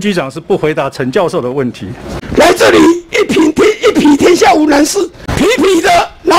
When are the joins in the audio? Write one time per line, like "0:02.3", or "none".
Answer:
0:02.1
0:05.2